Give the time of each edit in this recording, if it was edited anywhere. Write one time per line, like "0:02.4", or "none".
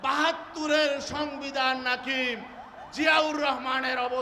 none